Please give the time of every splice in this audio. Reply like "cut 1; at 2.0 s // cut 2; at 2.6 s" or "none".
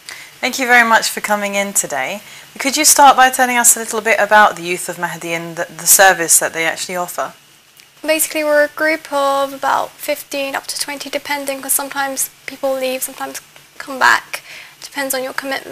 cut 1; at 2.1 s